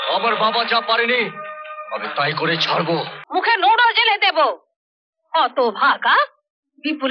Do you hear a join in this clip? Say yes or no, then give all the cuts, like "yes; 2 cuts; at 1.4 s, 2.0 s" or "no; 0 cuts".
yes; 1 cut; at 3.2 s